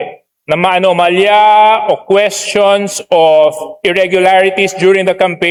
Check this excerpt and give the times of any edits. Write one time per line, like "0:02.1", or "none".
none